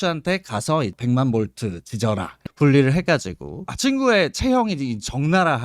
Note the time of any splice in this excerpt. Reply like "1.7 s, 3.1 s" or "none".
2.4 s